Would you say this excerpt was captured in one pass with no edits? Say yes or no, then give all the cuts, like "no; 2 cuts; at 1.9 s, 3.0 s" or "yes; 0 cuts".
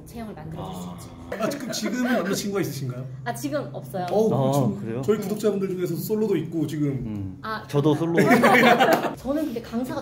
no; 2 cuts; at 1.3 s, 9.1 s